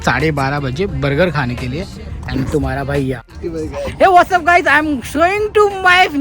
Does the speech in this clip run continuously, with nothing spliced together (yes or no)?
no